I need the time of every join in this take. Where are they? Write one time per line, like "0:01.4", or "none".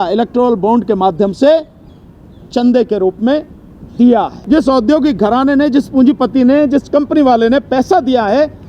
0:04.4